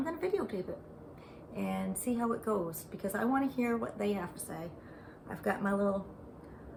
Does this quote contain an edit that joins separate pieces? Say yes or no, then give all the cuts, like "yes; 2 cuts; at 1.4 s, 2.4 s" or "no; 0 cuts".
no; 0 cuts